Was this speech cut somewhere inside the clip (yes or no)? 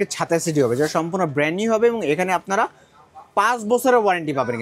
no